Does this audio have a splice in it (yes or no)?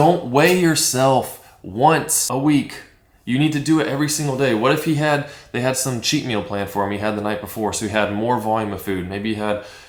no